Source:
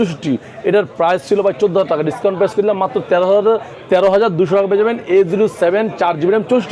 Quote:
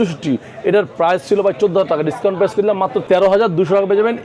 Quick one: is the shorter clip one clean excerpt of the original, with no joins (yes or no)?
no